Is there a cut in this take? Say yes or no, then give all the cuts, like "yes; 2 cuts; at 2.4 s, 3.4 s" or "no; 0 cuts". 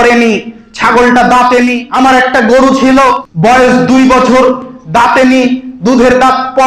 yes; 2 cuts; at 1.8 s, 3.3 s